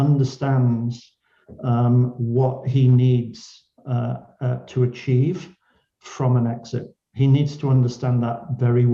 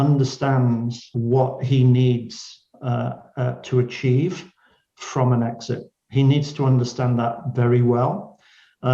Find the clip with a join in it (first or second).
second